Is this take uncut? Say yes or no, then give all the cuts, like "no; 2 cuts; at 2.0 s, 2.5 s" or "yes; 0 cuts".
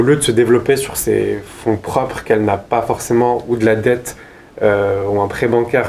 yes; 0 cuts